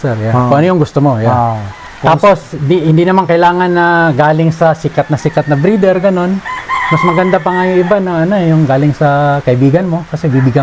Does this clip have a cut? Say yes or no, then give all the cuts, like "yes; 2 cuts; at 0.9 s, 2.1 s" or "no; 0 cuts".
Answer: no; 0 cuts